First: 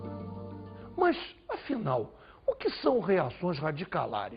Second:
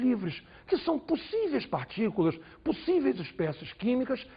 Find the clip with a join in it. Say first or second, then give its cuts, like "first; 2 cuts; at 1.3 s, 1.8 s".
second; 1 cut; at 3.3 s